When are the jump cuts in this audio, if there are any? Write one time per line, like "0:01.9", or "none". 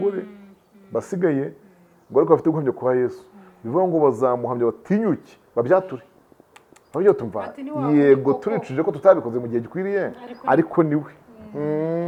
none